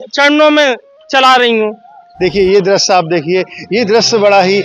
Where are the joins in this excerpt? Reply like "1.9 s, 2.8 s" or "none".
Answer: 2.0 s